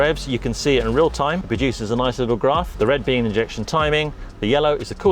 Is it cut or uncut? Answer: cut